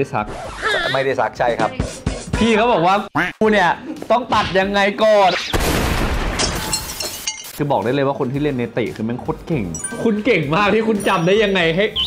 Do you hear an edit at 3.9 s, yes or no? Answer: no